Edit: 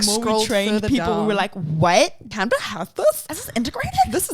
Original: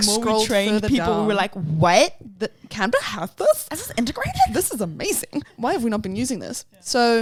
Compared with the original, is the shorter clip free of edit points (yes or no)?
no